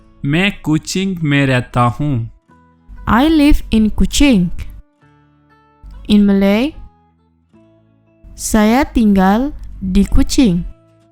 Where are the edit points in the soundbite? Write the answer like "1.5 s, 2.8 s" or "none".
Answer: 6.8 s, 8.2 s

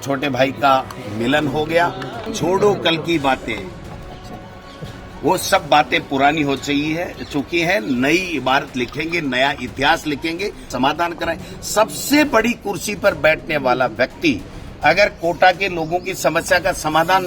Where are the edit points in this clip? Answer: 2.3 s, 10.7 s

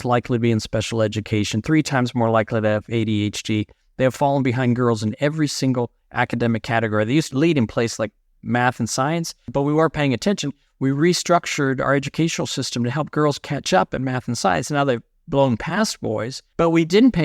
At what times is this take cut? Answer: 7.3 s, 9.5 s, 16.4 s

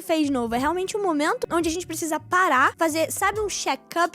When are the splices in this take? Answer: 1.4 s, 2.7 s

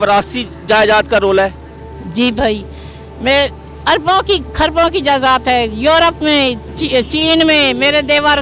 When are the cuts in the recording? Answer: 6.7 s

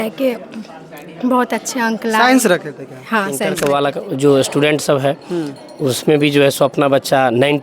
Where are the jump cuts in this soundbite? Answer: 3.5 s

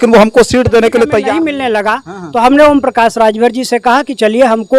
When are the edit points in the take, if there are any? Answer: 1.5 s

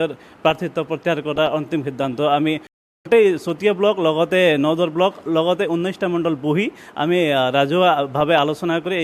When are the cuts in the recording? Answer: none

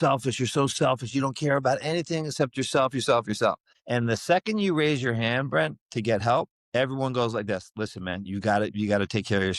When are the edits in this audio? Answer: 3.7 s, 6.6 s

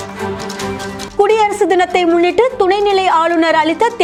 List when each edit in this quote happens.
none

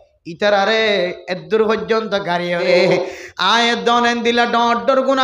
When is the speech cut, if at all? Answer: 2.6 s

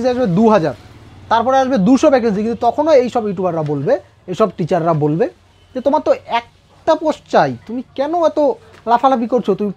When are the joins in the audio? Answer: none

